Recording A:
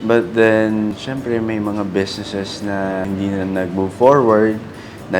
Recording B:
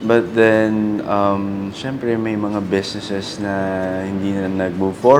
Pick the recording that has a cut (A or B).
A